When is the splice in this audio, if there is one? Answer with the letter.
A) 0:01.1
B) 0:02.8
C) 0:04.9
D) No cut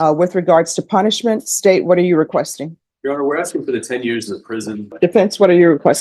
C